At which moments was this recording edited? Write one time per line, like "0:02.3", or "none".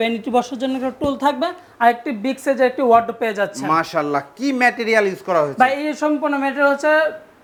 none